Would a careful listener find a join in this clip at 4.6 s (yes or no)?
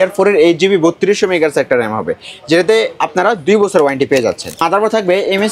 yes